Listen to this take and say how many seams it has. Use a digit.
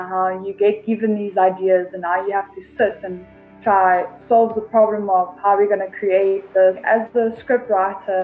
1